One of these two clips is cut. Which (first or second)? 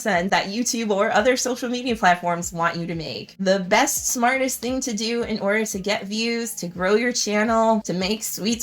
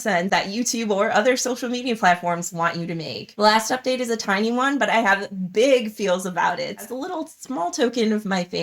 second